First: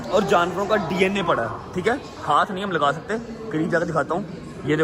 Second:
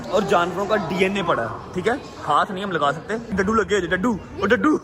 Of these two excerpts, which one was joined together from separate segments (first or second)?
second